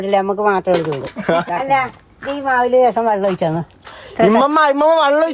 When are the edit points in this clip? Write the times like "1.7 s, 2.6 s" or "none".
1.4 s